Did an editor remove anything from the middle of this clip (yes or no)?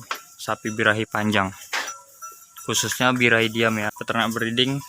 yes